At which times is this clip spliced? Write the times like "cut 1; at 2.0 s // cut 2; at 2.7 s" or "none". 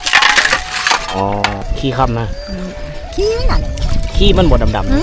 cut 1; at 1.7 s